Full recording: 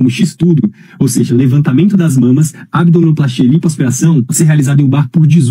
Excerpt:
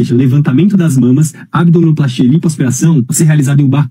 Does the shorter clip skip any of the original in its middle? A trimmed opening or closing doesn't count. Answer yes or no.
no